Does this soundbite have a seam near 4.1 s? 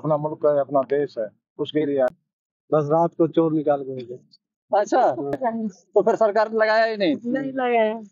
no; 2 cuts; at 2.1 s, 5.4 s

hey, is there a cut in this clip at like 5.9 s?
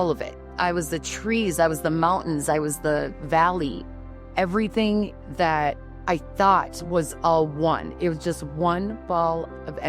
yes; 1 cut; at 5.9 s

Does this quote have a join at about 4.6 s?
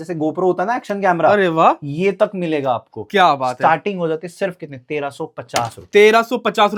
no; 0 cuts

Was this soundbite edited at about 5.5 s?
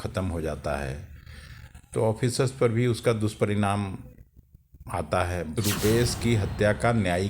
yes; 1 cut; at 5.5 s

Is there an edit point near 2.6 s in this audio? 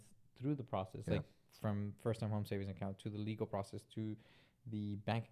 no; 0 cuts

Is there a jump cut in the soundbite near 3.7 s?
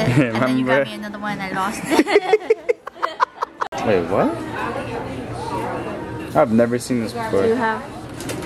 yes; 1 cut; at 3.7 s

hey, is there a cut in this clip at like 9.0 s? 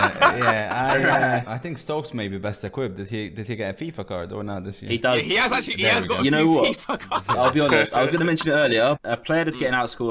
yes; 2 cuts; at 1.5 s, 9.0 s

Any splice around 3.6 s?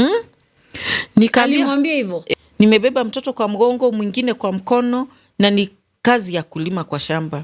no; 1 cut; at 2.2 s

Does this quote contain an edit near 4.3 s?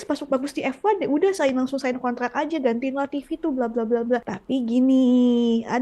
yes; 1 cut; at 4.3 s

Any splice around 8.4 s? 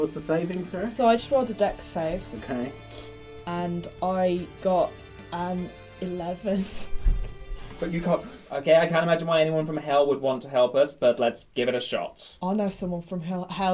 yes; 1 cut; at 8.4 s

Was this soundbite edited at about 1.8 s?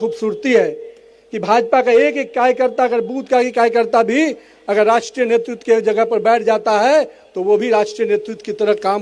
no; 0 cuts

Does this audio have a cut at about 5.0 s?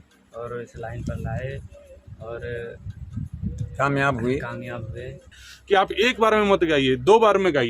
yes; 1 cut; at 5.0 s

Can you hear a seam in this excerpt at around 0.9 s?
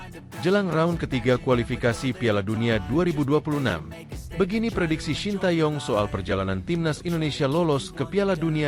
no; 0 cuts

